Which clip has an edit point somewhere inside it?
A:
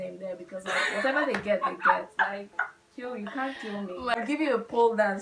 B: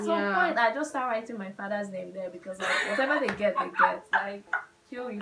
A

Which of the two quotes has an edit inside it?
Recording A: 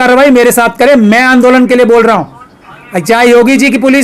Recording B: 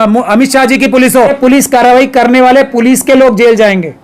B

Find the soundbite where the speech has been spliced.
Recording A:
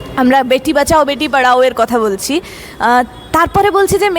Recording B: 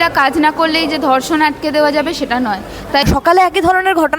B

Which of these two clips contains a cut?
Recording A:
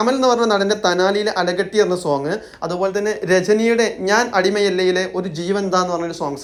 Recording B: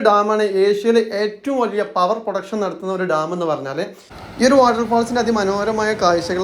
B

